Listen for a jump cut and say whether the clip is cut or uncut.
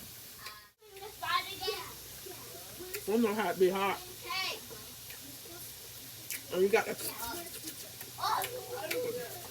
cut